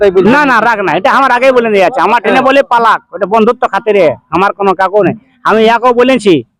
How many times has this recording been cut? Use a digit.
0